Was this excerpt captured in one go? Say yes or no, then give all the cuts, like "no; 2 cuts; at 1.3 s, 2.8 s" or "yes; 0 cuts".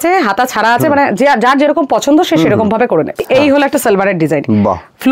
no; 1 cut; at 3.2 s